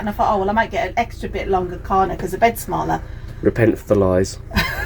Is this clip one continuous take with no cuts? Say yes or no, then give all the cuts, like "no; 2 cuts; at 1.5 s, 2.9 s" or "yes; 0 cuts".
yes; 0 cuts